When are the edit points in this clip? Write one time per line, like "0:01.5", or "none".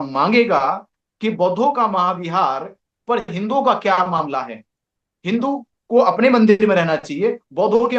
none